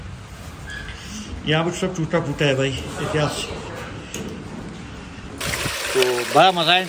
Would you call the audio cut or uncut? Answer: cut